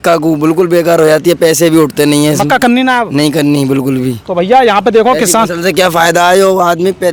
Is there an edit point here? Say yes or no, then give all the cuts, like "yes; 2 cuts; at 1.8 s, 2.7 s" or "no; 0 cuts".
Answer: no; 0 cuts